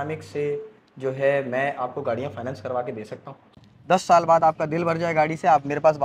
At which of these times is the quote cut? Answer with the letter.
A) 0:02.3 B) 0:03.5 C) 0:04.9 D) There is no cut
B